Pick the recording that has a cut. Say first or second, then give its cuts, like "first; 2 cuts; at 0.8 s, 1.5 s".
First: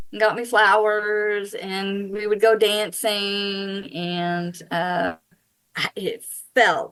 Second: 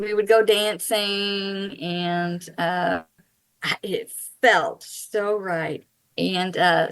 second; 1 cut; at 5.9 s